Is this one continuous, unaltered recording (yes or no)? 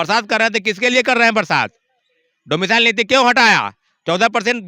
yes